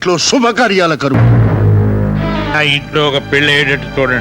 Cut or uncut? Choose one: cut